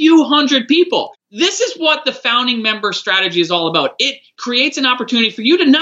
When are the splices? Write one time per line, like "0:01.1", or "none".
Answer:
0:01.1
0:04.3